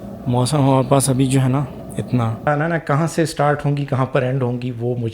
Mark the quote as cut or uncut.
cut